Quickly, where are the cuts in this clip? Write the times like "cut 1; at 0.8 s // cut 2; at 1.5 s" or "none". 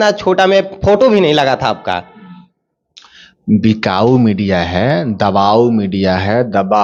none